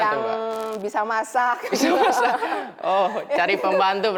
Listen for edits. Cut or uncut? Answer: uncut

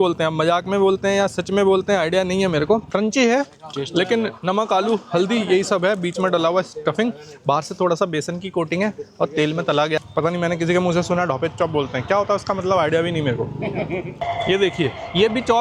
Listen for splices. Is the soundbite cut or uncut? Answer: cut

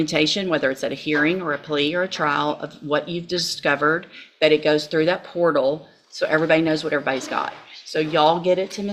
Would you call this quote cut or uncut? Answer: uncut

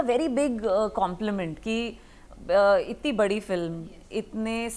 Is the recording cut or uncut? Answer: uncut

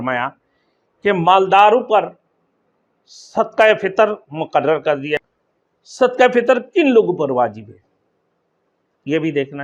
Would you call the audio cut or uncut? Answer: cut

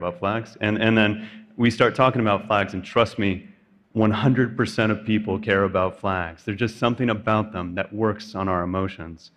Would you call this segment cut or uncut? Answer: uncut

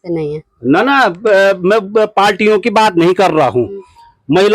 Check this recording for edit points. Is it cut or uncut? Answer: uncut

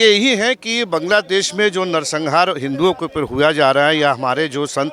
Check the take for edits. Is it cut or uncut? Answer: uncut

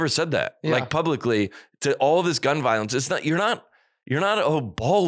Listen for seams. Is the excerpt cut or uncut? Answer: uncut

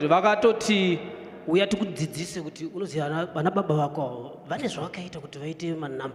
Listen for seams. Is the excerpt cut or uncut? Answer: uncut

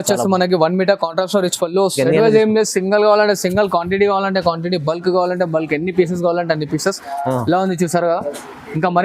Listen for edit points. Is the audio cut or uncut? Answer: cut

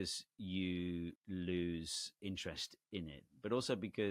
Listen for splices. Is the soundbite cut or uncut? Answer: cut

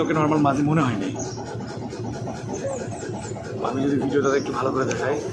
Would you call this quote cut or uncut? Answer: uncut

